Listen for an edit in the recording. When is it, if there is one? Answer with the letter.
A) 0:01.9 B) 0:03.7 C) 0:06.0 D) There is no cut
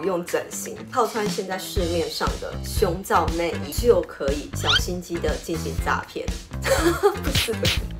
B